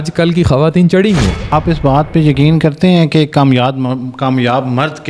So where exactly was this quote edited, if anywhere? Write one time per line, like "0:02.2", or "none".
0:01.5